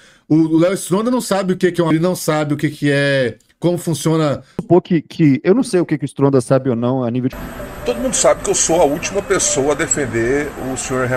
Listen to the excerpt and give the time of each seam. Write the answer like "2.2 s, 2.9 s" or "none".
1.9 s, 4.6 s, 7.3 s